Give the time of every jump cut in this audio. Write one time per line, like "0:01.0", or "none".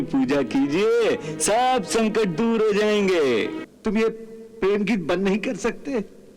0:03.6